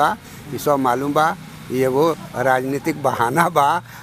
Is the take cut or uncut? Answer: uncut